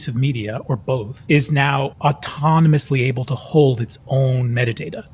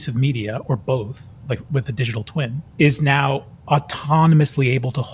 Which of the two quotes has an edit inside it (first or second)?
first